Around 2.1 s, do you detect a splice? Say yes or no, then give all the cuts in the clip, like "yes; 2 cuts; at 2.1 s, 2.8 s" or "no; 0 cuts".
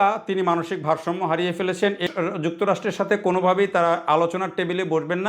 yes; 1 cut; at 2.1 s